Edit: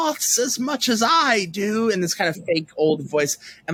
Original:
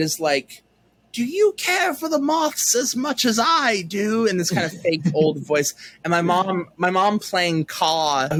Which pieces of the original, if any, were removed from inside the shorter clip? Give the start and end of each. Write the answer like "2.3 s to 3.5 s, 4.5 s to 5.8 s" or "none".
none